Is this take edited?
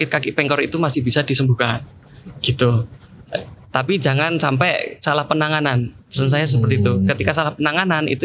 no; 0 cuts

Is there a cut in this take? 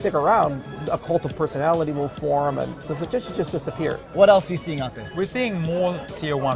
yes; 3 cuts; at 2.8 s, 4.1 s, 5.0 s

